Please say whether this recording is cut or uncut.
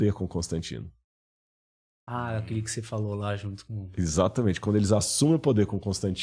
uncut